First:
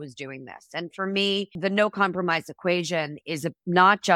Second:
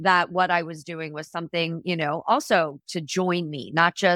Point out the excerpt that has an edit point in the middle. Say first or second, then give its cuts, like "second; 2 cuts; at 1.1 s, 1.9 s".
first; 1 cut; at 1.5 s